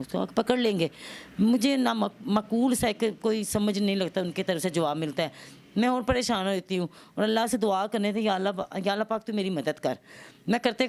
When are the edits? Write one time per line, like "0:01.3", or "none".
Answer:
none